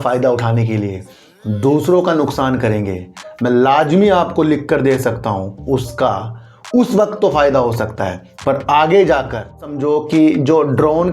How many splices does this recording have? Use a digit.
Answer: 1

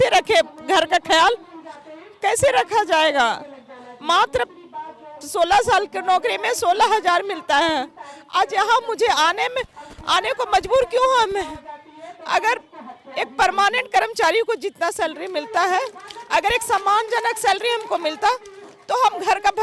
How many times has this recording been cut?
0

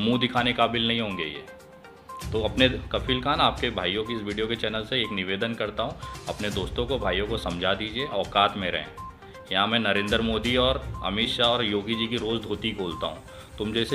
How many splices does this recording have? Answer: 0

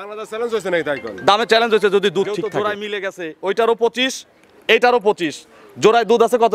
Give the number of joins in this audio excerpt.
1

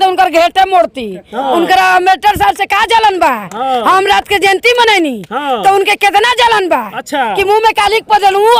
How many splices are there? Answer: 0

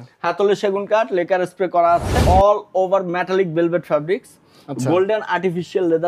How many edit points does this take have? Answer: 1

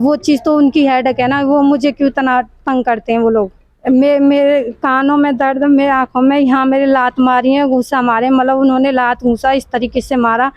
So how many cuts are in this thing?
1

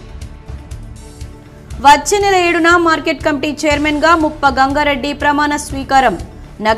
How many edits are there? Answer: 1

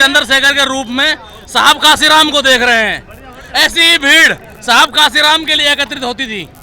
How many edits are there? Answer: 0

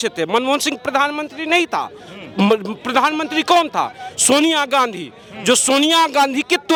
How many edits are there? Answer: 0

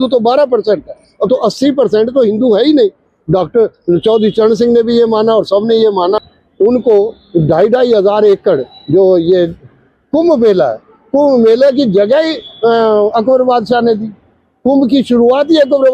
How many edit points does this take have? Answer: 1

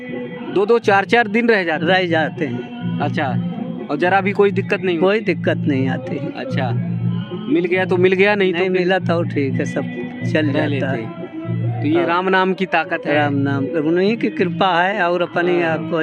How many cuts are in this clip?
0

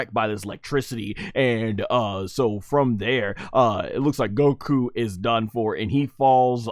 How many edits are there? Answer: 0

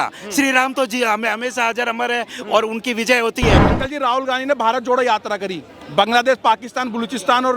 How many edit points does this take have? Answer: 1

